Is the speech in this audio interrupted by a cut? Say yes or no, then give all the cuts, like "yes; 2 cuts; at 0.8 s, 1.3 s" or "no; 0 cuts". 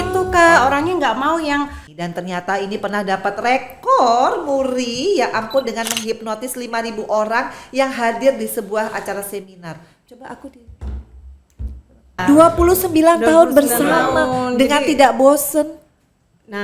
yes; 2 cuts; at 1.9 s, 12.2 s